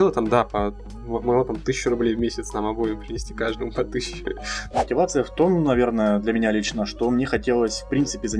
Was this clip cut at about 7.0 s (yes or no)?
no